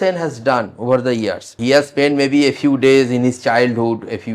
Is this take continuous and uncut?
no; 1 cut; at 1.5 s

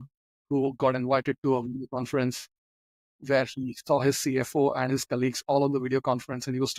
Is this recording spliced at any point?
no; 0 cuts

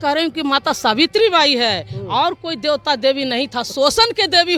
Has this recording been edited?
no; 0 cuts

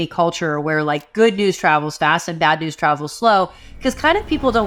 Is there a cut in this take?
no; 0 cuts

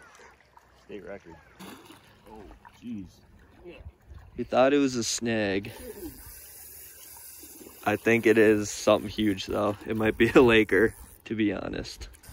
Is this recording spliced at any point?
yes; 1 cut; at 1.6 s

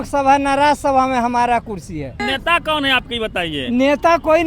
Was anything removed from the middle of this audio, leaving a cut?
yes; 1 cut; at 2.2 s

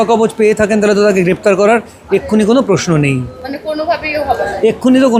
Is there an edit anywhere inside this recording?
no; 0 cuts

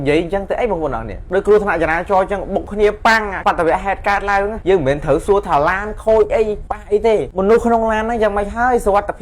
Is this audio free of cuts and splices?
no; 1 cut; at 1.2 s

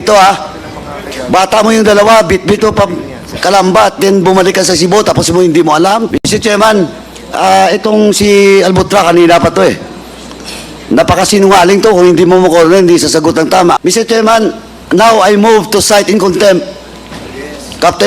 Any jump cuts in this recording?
yes; 2 cuts; at 6.1 s, 13.8 s

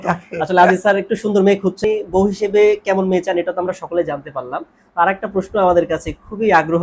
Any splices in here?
yes; 1 cut; at 1.8 s

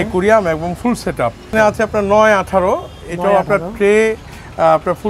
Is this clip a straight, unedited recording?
no; 1 cut; at 1.5 s

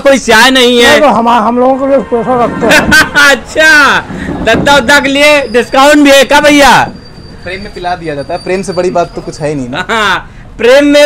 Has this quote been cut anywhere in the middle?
no; 0 cuts

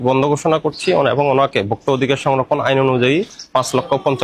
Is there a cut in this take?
no; 0 cuts

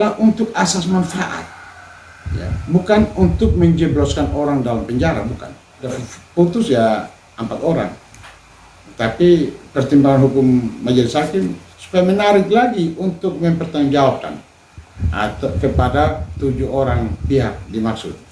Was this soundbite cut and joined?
yes; 1 cut; at 6.0 s

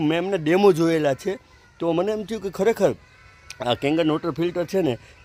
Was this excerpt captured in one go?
yes; 0 cuts

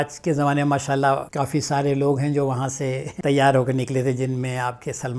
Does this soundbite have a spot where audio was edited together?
yes; 2 cuts; at 1.3 s, 3.1 s

